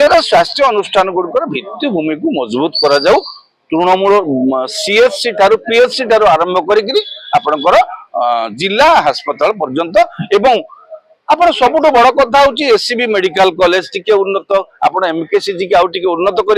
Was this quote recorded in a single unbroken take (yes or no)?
yes